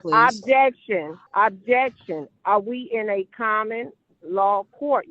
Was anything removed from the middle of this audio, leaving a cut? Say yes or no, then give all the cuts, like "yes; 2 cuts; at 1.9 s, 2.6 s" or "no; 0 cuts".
yes; 1 cut; at 1.2 s